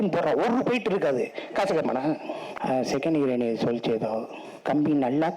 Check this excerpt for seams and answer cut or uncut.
cut